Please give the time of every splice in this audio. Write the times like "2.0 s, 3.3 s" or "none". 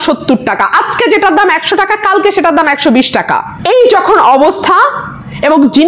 3.5 s